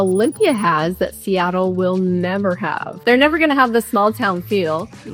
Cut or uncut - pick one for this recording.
cut